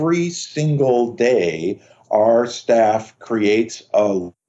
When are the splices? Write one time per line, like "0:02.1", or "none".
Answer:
none